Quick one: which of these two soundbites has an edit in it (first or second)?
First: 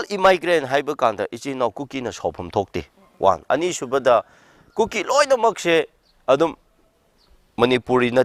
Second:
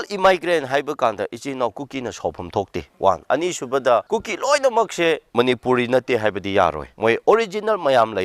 second